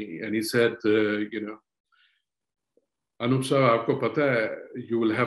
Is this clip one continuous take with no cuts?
yes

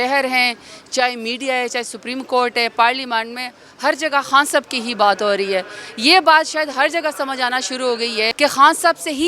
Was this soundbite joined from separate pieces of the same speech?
yes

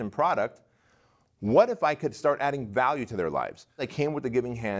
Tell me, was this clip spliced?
yes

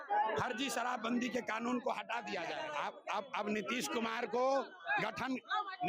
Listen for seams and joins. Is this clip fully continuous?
no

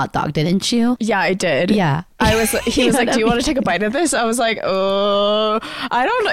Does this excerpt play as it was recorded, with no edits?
no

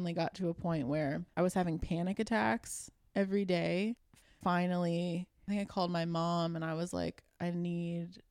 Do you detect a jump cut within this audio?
yes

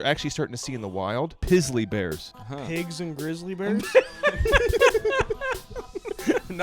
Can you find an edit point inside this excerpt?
yes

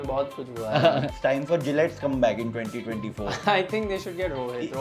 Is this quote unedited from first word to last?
no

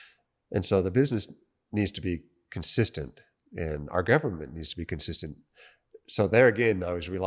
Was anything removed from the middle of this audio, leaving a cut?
no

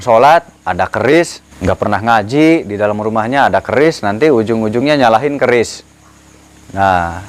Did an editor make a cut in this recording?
yes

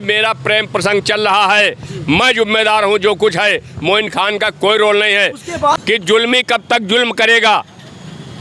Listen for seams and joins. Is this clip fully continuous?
no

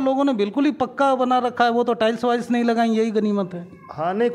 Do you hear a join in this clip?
no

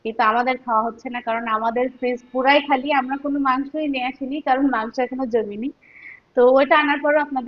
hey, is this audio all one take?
yes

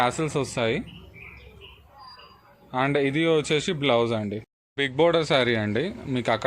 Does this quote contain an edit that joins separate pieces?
yes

